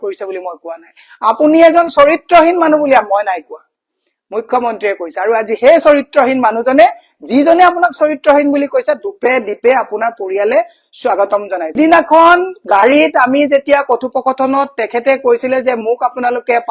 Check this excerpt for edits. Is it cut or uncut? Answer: cut